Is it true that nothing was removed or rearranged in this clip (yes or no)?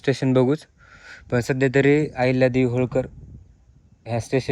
yes